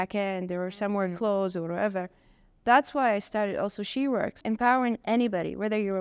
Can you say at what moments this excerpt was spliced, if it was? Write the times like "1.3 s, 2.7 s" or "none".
4.4 s